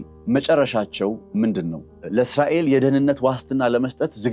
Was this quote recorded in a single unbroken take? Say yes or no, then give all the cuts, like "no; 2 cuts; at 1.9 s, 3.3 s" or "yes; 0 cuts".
no; 1 cut; at 2.0 s